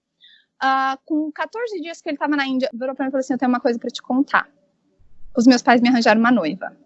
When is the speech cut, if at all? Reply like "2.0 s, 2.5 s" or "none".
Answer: 2.7 s